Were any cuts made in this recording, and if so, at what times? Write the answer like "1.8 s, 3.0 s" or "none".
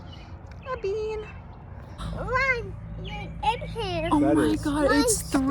2.0 s